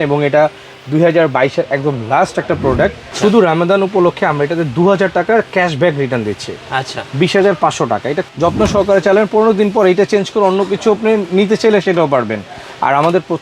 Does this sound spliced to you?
yes; 2 cuts; at 3.1 s, 8.3 s

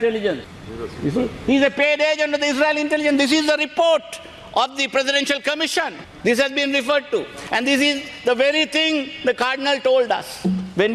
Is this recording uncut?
yes; 0 cuts

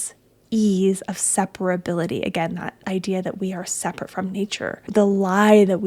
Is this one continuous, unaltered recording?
no; 1 cut; at 4.9 s

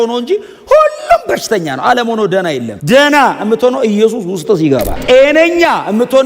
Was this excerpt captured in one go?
yes; 0 cuts

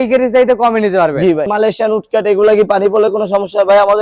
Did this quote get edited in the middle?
yes; 1 cut; at 1.5 s

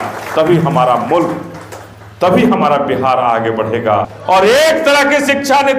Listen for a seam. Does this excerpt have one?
yes; 1 cut; at 4.1 s

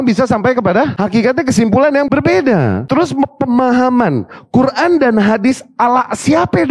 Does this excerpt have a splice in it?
yes; 3 cuts; at 0.9 s, 2.1 s, 2.8 s

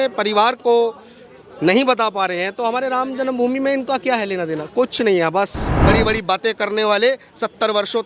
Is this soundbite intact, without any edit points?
no; 1 cut; at 5.7 s

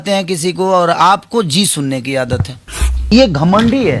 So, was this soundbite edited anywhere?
yes; 1 cut; at 3.1 s

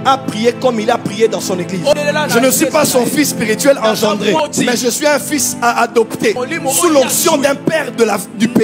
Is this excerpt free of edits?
no; 3 cuts; at 1.9 s, 4.4 s, 6.4 s

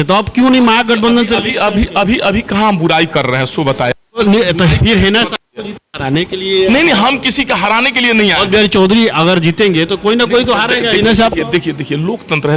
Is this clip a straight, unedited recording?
yes; 0 cuts

